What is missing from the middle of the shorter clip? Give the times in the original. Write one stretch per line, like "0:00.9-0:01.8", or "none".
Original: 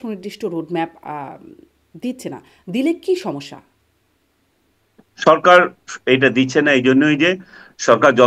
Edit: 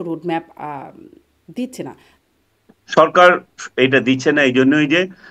0:02.5-0:04.4